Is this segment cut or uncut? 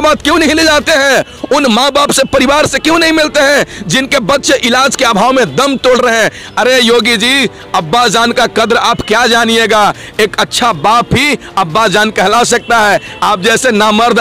uncut